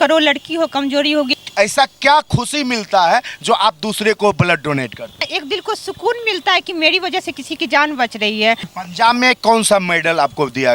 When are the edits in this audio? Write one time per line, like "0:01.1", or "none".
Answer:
0:01.3
0:05.3
0:08.7